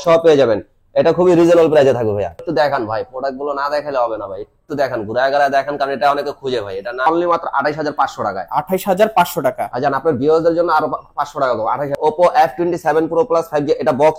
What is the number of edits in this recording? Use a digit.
3